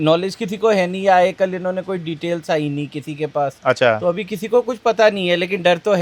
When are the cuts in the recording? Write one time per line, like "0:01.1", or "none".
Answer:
none